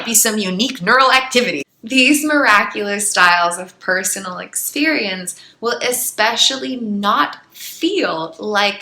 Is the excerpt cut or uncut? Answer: cut